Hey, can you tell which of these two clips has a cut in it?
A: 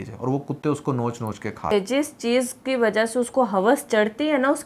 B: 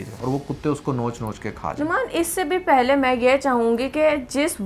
A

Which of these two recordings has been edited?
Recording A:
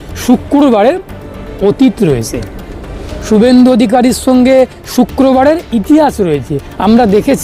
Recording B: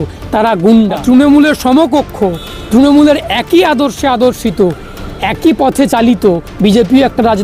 B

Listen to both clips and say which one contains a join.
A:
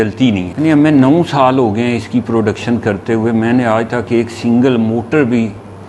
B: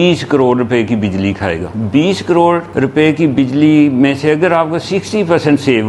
B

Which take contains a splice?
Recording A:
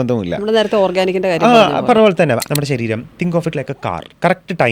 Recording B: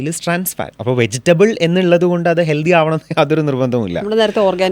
A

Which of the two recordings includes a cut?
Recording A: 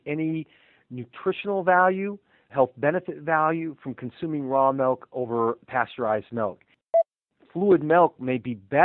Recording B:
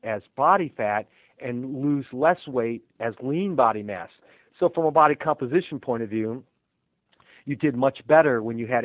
A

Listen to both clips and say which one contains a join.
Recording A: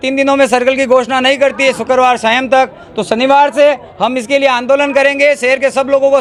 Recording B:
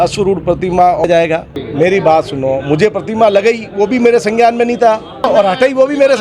B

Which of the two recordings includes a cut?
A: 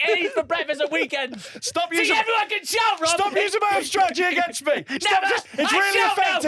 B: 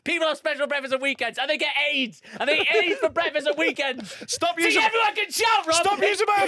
A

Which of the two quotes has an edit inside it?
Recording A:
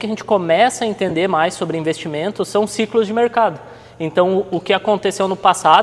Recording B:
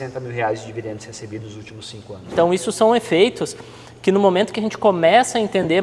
B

